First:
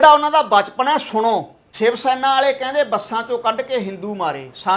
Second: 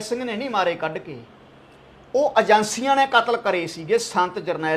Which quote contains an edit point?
first; 1 cut; at 1.6 s

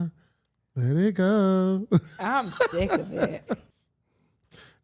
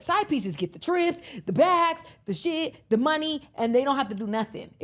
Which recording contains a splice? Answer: first; 1 cut; at 3.7 s

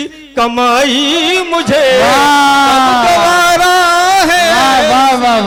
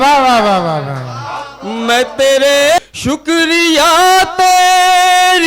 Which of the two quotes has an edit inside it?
second; 1 cut; at 2.9 s

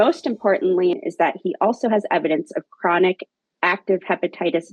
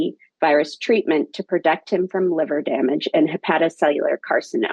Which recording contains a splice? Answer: first; 1 cut; at 1.0 s

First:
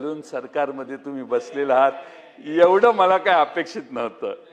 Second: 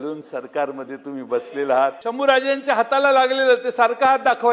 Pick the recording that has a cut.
second; 1 cut; at 2.0 s

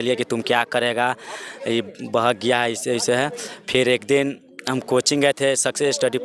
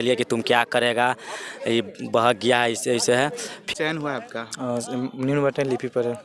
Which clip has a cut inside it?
second; 1 cut; at 3.6 s

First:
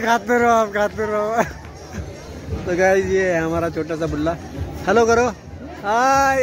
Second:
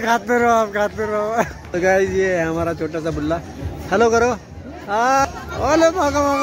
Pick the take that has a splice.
second; 2 cuts; at 1.6 s, 5.2 s

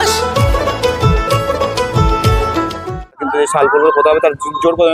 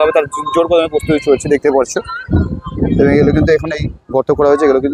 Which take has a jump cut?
first; 1 cut; at 3.2 s

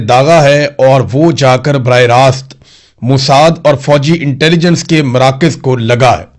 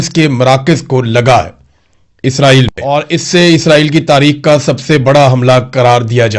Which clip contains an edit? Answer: second; 1 cut; at 2.9 s

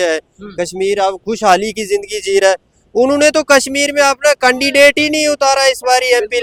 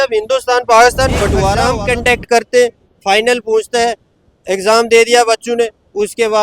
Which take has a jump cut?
second; 1 cut; at 1.6 s

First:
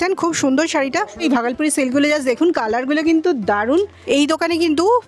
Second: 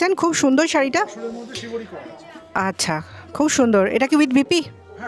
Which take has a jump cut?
first; 2 cuts; at 1.2 s, 4.0 s

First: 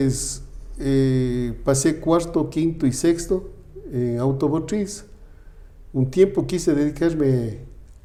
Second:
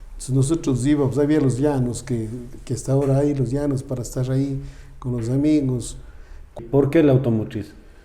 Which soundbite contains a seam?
second; 1 cut; at 6.6 s

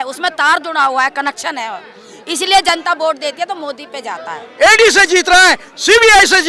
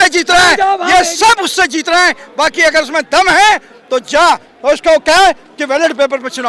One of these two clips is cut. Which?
first; 1 cut; at 4.5 s

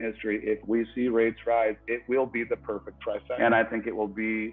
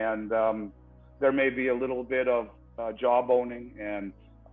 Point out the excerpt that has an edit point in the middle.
first; 1 cut; at 3.3 s

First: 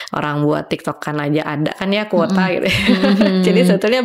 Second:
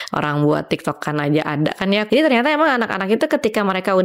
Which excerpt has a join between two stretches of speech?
second; 1 cut; at 2.0 s

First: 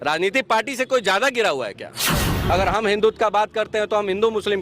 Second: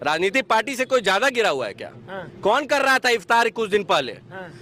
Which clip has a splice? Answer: first; 1 cut; at 2.2 s

